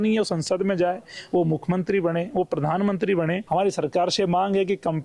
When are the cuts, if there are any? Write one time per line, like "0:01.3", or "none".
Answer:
0:03.5